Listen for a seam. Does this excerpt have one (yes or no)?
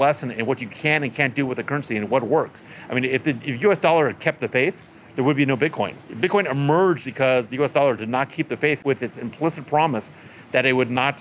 yes